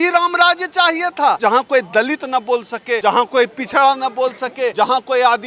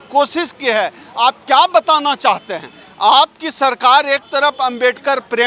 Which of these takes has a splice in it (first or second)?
first